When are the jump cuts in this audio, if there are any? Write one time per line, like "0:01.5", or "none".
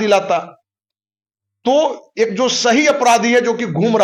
none